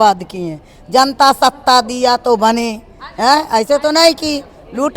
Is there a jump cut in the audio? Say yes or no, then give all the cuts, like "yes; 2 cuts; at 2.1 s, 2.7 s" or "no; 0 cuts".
no; 0 cuts